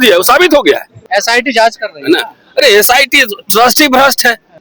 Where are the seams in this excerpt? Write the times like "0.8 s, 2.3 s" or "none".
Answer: 1.0 s